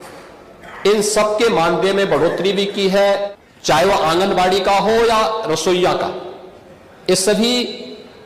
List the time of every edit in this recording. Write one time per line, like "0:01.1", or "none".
0:03.3